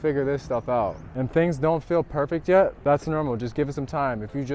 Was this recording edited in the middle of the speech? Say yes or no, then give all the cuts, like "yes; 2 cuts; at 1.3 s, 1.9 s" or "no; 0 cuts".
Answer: yes; 1 cut; at 1.2 s